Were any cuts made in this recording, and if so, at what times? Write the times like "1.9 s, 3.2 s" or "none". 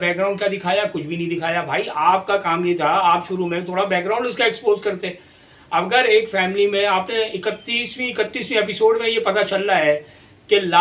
none